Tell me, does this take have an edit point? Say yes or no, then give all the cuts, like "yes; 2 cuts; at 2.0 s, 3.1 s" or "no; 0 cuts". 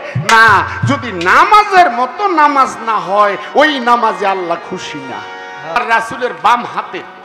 yes; 1 cut; at 5.8 s